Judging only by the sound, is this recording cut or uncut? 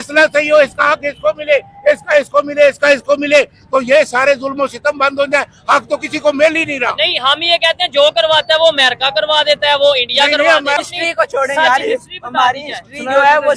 cut